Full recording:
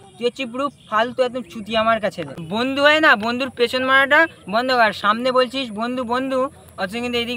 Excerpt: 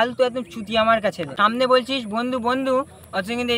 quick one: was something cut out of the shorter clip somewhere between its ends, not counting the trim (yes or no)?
yes